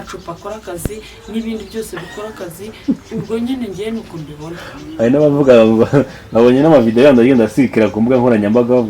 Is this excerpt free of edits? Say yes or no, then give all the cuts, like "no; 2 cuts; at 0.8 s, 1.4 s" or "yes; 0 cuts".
yes; 0 cuts